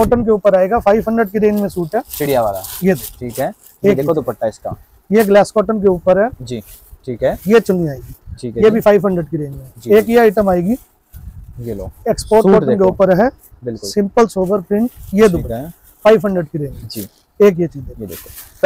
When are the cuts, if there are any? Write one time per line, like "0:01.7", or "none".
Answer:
none